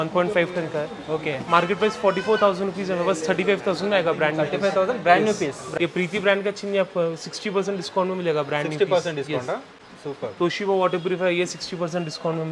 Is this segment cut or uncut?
cut